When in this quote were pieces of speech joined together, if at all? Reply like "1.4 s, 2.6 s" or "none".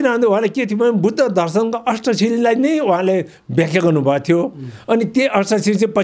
none